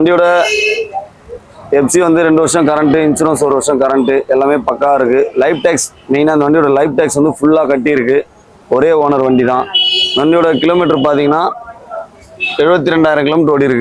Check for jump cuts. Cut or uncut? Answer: uncut